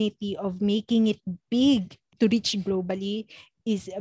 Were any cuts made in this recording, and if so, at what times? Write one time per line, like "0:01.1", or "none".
0:02.0